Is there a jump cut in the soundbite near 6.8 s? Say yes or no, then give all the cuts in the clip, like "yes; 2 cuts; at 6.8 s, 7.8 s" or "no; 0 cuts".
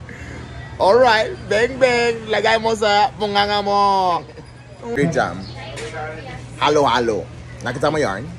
no; 1 cut; at 5.0 s